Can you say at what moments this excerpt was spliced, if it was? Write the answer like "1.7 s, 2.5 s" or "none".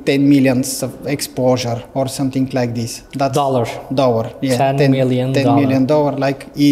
none